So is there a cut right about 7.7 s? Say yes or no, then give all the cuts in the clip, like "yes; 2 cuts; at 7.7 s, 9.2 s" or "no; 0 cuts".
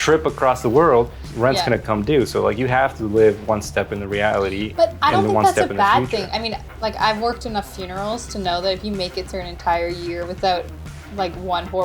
no; 1 cut; at 1.2 s